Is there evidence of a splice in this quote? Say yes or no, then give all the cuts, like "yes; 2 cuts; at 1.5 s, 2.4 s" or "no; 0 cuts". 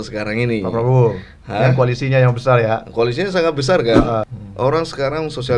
yes; 1 cut; at 4.2 s